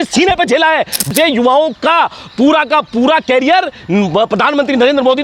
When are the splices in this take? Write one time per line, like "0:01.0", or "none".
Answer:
0:01.1